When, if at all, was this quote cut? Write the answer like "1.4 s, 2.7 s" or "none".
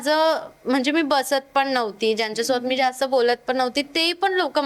none